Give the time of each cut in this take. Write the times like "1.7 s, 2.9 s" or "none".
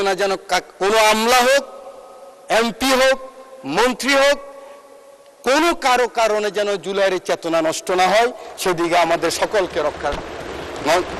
none